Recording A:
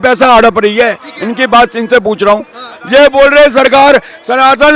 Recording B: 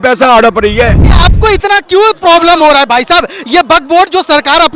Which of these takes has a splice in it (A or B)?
B